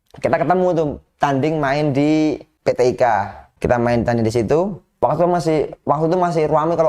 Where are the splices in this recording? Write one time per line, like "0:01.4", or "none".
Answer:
0:02.5
0:03.5
0:04.8